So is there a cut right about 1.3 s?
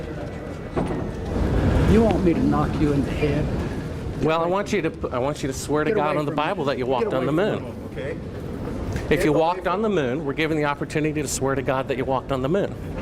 yes; 1 cut; at 1.3 s

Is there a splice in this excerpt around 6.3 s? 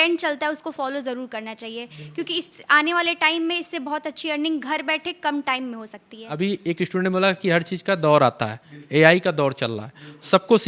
yes; 1 cut; at 6.3 s

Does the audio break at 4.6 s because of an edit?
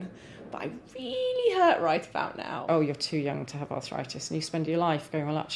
no; 1 cut; at 2.6 s

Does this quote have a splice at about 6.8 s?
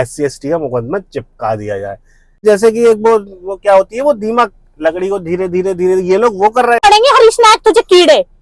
yes; 2 cuts; at 2.4 s, 6.8 s

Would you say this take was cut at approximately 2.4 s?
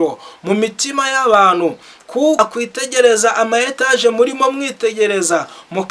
yes; 1 cut; at 2.4 s

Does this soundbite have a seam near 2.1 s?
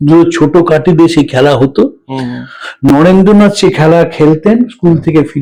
no; 0 cuts

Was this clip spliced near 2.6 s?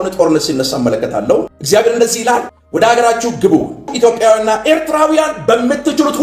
yes; 3 cuts; at 1.6 s, 2.6 s, 3.9 s

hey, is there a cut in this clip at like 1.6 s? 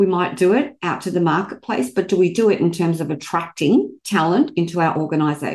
no; 0 cuts

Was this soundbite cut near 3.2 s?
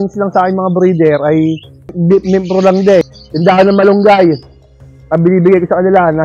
yes; 2 cuts; at 2.0 s, 3.2 s

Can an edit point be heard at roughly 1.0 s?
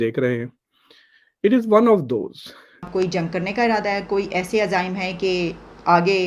no; 1 cut; at 2.9 s

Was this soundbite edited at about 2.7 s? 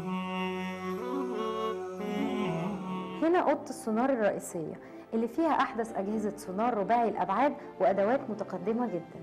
yes; 1 cut; at 2.7 s

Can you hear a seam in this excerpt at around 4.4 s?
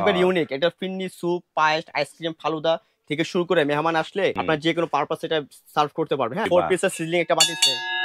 yes; 2 cuts; at 4.4 s, 6.5 s

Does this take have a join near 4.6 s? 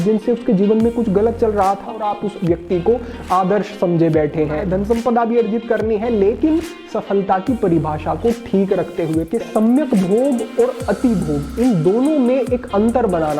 yes; 3 cuts; at 2.0 s, 4.6 s, 9.3 s

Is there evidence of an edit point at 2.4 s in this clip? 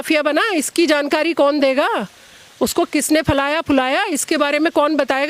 no; 0 cuts

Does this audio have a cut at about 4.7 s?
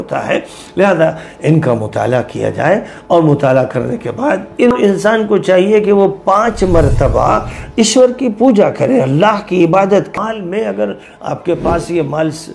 yes; 2 cuts; at 4.7 s, 10.1 s

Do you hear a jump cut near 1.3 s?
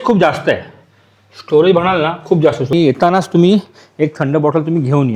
no; 1 cut; at 2.7 s

